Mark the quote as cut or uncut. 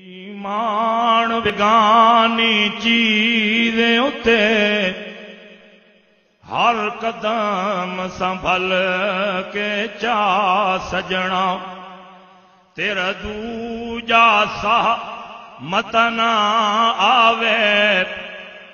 cut